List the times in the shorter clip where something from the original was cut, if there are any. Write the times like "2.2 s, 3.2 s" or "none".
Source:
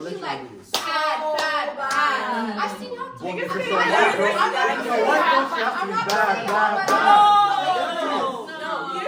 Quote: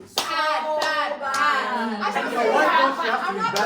2.2 s